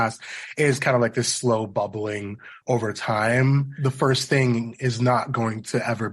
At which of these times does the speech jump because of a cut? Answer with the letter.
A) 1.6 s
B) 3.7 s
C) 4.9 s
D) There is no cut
B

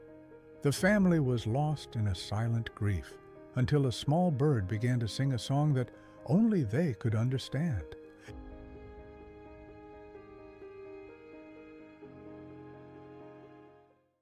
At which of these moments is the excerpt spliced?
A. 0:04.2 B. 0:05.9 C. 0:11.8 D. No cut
D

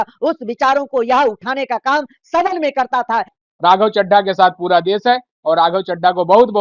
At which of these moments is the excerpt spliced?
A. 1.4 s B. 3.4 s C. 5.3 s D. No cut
B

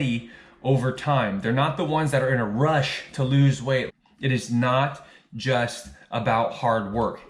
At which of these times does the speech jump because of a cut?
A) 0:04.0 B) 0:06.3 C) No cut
A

